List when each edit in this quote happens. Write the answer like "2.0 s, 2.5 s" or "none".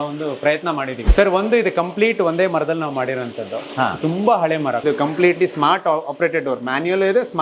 1.0 s, 4.8 s